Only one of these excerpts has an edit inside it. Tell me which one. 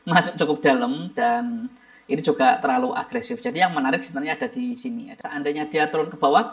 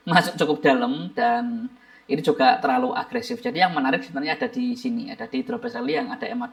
first; 1 cut; at 5.1 s

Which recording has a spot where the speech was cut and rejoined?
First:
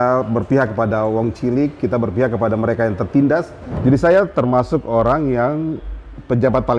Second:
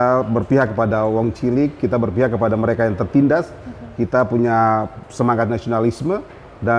first; 1 cut; at 3.6 s

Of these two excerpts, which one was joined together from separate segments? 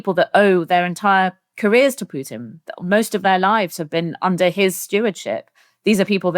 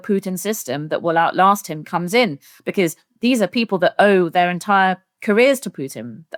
first; 1 cut; at 4.4 s

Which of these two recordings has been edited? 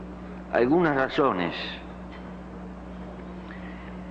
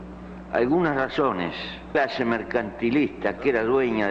first; 1 cut; at 1.9 s

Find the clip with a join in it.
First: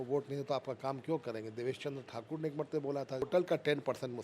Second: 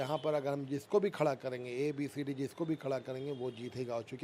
first; 1 cut; at 3.2 s

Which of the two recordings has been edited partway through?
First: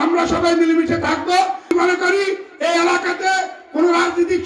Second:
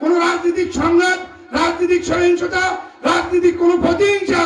first; 1 cut; at 1.7 s

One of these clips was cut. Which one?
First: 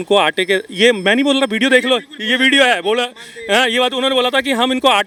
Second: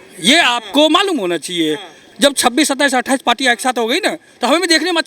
second; 1 cut; at 2.0 s

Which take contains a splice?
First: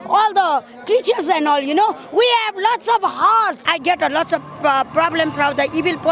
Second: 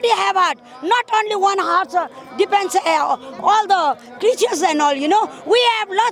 first; 1 cut; at 3.7 s

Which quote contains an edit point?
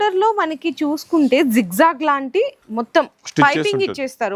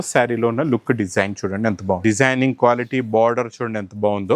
second; 1 cut; at 2.0 s

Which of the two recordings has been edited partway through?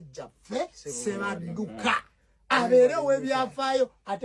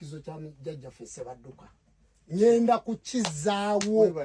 first; 1 cut; at 1.9 s

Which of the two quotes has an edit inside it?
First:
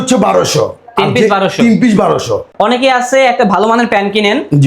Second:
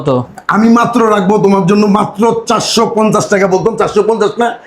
first; 1 cut; at 2.4 s

